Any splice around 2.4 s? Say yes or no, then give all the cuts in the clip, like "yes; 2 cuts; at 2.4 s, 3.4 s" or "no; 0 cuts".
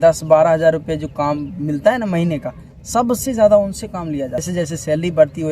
no; 1 cut; at 4.5 s